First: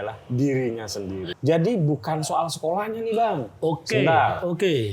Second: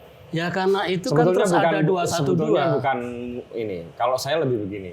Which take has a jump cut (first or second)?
first